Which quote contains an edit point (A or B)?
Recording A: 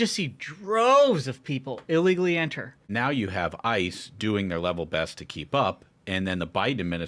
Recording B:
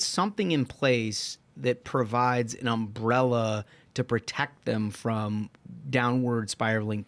A